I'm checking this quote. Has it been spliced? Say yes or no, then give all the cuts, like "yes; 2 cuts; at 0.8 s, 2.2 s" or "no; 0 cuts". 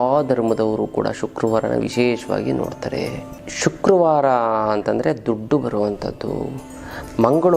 yes; 1 cut; at 3.4 s